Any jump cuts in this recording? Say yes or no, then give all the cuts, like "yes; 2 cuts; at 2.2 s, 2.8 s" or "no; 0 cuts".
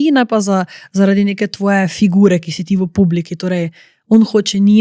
no; 0 cuts